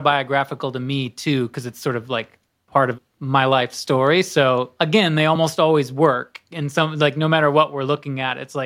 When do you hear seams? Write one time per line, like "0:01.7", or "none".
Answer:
0:03.1
0:04.7